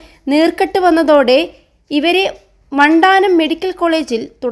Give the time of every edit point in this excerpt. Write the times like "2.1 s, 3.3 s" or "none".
none